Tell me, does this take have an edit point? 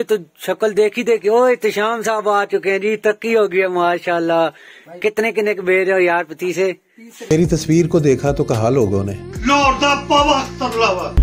yes; 2 cuts; at 3.1 s, 7.3 s

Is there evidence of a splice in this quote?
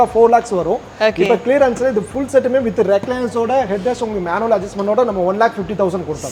no; 0 cuts

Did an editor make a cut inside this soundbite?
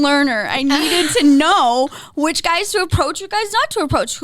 no; 0 cuts

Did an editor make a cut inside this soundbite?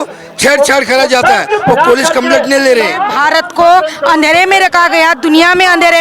yes; 1 cut; at 3.1 s

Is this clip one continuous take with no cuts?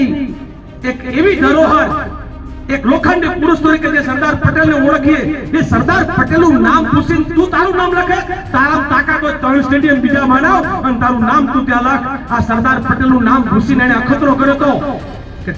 yes; 0 cuts

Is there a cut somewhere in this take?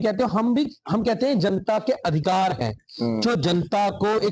no; 0 cuts

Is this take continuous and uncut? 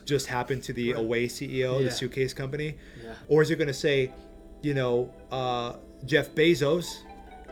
no; 1 cut; at 3.1 s

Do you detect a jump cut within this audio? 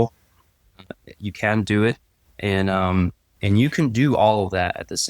yes; 1 cut; at 3.4 s

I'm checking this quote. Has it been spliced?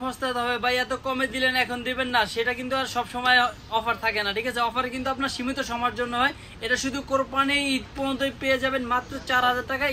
no; 0 cuts

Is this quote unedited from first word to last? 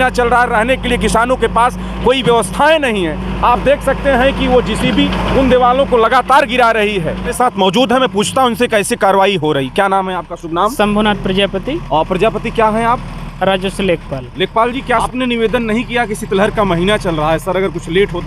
no; 2 cuts; at 7.3 s, 15.0 s

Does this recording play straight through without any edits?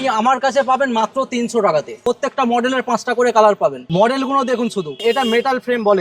no; 3 cuts; at 1.9 s, 3.8 s, 4.9 s

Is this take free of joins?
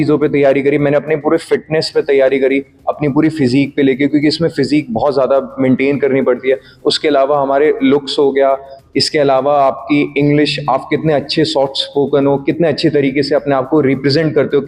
yes; 0 cuts

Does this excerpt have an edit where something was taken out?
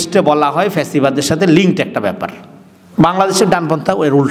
no; 0 cuts

